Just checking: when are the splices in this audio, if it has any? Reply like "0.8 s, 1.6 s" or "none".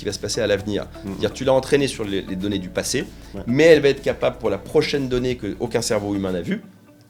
none